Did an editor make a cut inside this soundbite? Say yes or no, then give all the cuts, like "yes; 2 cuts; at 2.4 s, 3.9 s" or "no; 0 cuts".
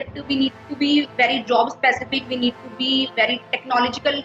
no; 0 cuts